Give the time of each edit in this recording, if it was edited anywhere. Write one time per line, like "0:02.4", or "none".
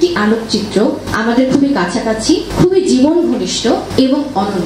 0:01.1
0:02.5
0:03.9